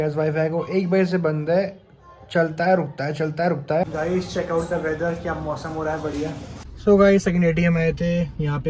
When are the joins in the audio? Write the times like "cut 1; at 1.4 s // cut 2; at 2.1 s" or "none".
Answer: cut 1; at 3.9 s // cut 2; at 6.6 s